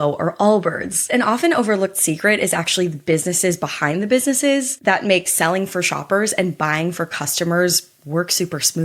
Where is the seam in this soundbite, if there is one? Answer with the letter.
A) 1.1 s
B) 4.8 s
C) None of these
A